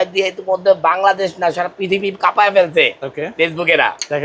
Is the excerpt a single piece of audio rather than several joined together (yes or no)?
yes